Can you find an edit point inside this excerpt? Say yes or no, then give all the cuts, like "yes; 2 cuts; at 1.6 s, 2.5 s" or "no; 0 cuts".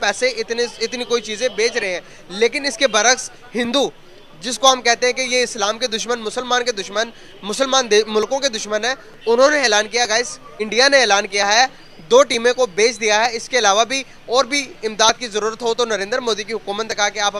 no; 0 cuts